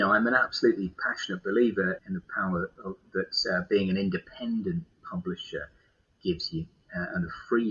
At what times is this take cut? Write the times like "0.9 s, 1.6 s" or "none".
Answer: 2.0 s